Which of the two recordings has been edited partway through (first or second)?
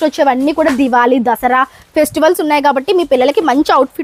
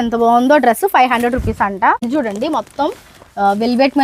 second